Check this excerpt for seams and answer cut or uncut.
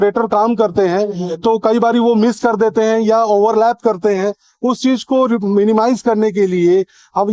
uncut